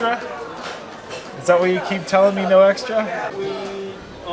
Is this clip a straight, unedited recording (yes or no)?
no